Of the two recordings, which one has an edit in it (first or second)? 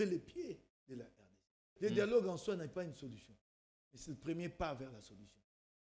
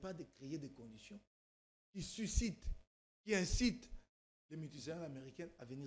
first